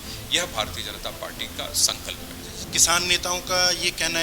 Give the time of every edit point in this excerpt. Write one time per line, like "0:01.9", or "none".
0:02.6